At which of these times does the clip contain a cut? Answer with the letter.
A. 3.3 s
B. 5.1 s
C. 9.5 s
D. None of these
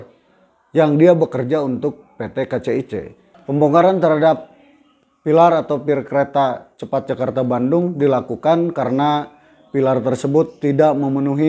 A